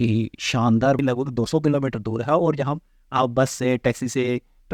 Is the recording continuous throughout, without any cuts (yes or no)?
no